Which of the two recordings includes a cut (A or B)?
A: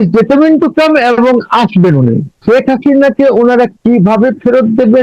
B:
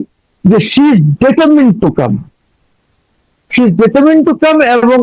A